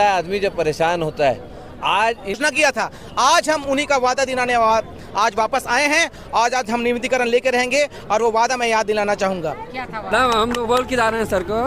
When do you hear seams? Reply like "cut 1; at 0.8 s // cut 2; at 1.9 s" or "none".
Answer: cut 1; at 2.4 s // cut 2; at 10.1 s